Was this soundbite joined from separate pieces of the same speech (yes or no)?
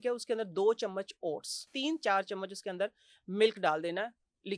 yes